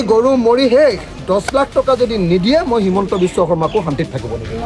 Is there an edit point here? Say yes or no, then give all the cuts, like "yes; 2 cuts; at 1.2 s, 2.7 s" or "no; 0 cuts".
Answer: yes; 1 cut; at 1.2 s